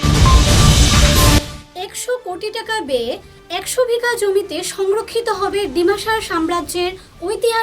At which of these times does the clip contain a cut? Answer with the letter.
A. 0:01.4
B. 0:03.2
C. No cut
A